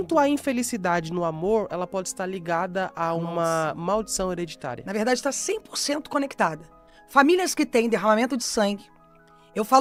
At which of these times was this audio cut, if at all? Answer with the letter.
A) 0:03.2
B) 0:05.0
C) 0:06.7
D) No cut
D